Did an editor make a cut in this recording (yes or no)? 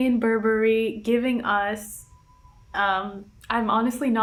no